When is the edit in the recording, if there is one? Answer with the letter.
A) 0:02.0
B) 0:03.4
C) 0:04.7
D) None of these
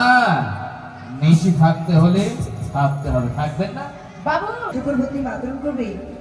C